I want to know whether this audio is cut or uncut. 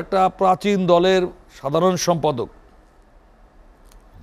uncut